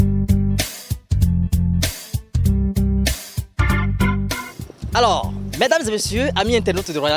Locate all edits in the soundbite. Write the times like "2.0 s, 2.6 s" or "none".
1.5 s